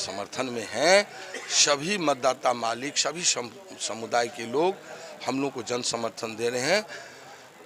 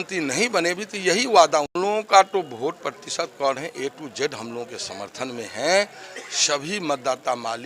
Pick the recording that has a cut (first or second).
second